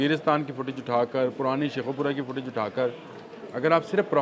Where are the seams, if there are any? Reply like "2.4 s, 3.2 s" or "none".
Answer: none